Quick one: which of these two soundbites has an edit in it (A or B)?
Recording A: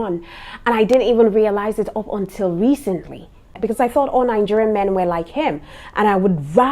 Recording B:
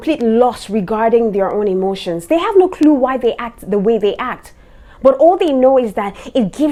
A